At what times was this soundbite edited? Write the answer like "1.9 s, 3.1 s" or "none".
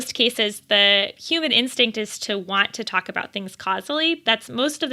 1.2 s, 4.2 s